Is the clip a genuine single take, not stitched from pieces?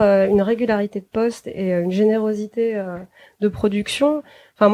yes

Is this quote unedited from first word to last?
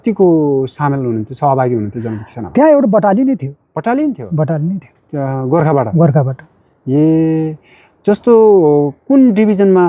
yes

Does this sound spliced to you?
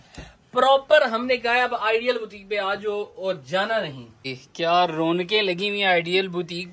yes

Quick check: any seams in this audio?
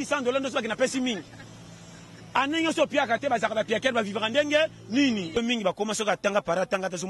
yes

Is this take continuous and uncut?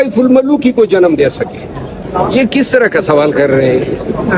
no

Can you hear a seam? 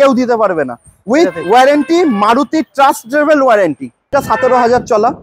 yes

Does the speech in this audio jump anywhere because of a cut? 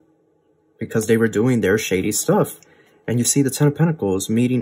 no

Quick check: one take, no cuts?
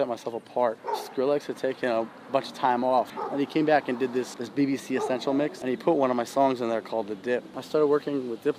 no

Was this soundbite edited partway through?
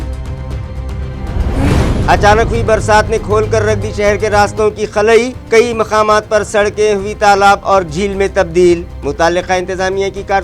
no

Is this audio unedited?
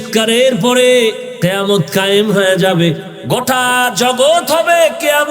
no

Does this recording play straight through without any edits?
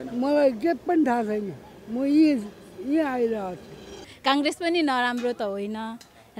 no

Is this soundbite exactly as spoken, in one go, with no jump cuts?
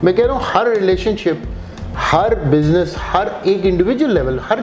yes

